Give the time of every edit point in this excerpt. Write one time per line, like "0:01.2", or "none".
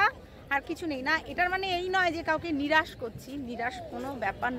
none